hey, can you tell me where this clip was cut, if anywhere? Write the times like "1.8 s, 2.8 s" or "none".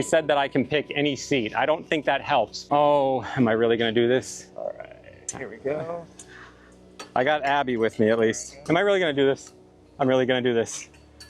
2.6 s, 8.5 s